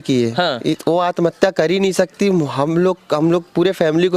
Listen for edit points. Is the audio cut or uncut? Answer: uncut